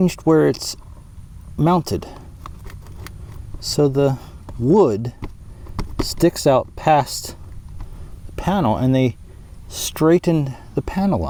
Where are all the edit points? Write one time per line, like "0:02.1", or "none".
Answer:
none